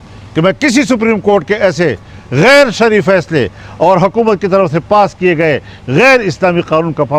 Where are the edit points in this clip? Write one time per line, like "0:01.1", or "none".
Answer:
none